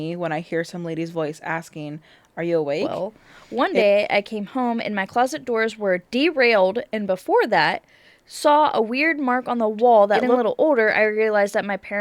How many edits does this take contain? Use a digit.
2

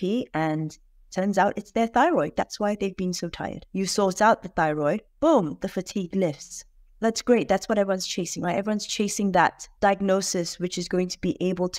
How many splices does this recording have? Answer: 2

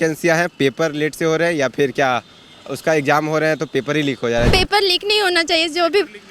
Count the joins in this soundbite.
1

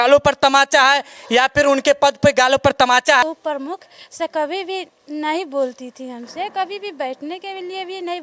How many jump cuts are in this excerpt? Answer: 1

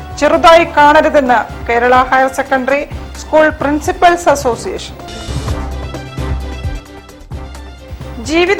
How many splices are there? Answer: 0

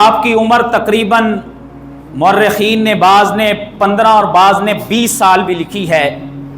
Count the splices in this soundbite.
0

